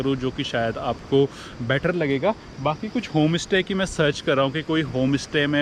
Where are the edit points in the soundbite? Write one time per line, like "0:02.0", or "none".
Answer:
none